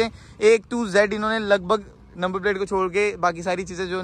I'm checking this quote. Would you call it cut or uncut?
uncut